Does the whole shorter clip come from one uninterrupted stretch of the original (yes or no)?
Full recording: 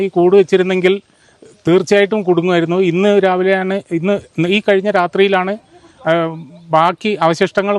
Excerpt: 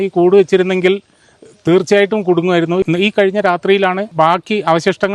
no